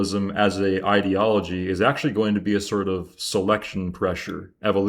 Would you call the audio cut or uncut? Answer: uncut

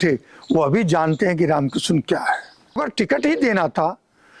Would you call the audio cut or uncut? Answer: cut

